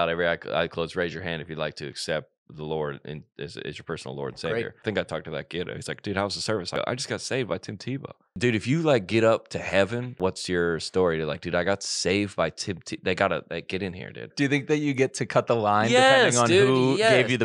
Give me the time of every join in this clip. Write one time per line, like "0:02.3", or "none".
0:04.8
0:06.7
0:08.3
0:10.2
0:14.3